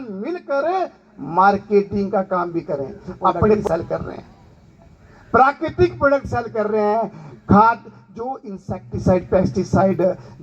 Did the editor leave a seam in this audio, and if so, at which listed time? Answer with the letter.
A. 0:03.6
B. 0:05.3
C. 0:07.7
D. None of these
A